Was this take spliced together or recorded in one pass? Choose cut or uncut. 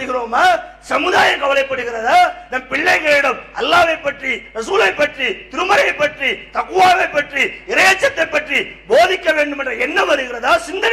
uncut